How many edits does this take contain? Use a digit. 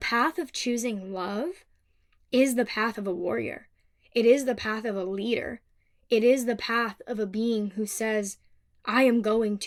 0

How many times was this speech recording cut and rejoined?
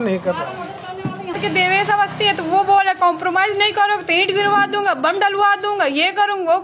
1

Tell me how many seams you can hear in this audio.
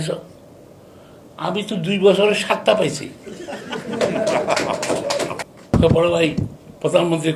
1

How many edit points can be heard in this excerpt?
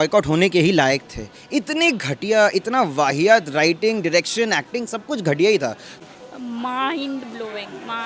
1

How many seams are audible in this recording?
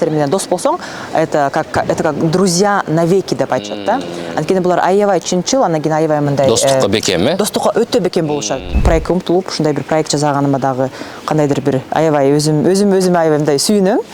1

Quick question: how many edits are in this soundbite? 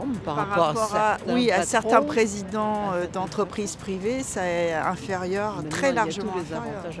0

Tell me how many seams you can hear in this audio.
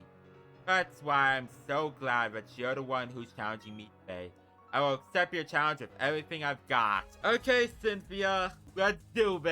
2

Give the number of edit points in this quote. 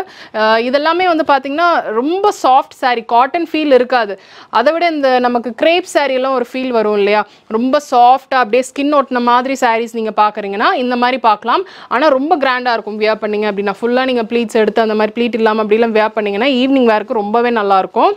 0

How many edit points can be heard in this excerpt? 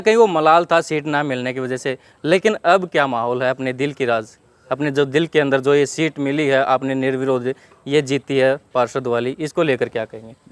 0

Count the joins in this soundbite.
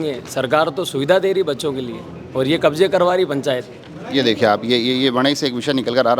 0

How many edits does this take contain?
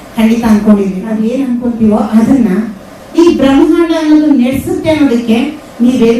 1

